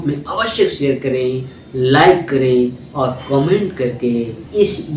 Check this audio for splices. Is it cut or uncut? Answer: uncut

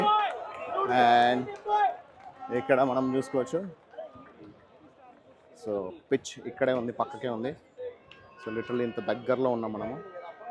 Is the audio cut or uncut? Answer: uncut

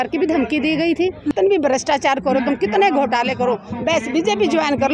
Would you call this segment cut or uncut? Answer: cut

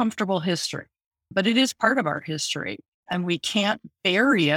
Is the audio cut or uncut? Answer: cut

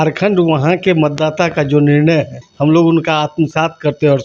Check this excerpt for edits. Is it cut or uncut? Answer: cut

